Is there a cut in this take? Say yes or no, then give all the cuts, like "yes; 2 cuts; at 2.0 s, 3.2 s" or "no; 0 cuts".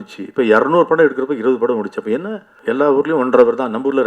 yes; 1 cut; at 2.5 s